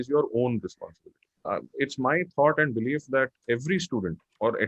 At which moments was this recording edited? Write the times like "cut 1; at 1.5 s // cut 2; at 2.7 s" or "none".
cut 1; at 1.6 s